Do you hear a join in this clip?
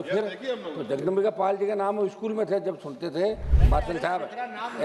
yes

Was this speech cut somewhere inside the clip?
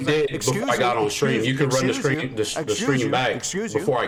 no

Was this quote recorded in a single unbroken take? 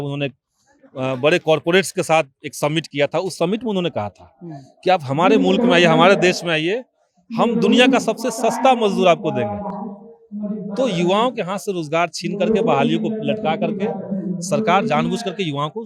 yes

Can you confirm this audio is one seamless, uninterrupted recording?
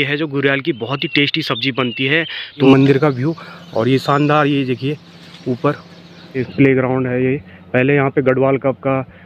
no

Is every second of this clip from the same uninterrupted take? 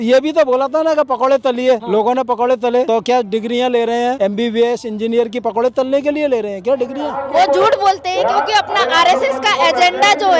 no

